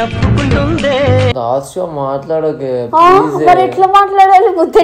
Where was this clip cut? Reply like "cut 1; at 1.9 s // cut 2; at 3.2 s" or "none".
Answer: cut 1; at 1.4 s